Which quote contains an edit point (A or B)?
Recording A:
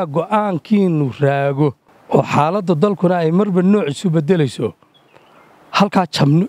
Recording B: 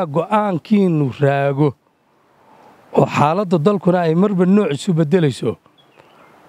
A